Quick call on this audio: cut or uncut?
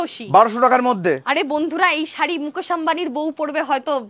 uncut